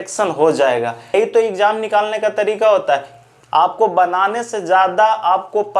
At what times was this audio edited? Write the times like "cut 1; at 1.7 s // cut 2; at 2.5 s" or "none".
cut 1; at 1.1 s

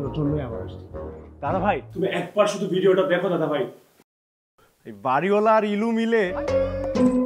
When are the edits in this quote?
cut 1; at 6.3 s

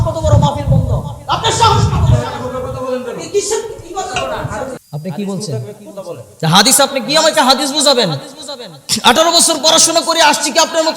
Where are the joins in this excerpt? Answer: cut 1; at 4.8 s

